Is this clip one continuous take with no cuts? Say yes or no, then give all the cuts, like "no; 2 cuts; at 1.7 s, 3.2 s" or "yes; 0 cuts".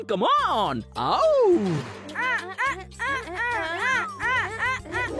no; 1 cut; at 2.0 s